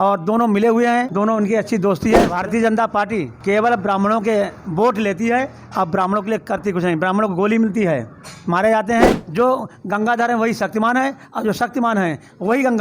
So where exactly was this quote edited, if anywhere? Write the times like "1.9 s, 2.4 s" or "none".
1.1 s, 2.3 s, 3.3 s, 9.2 s